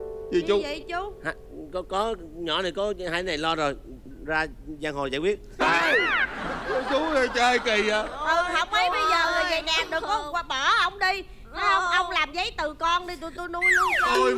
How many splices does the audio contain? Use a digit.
0